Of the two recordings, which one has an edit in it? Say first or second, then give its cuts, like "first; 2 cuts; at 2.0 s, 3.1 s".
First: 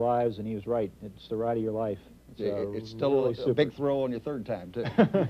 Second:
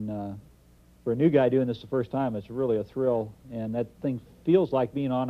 second; 1 cut; at 4.1 s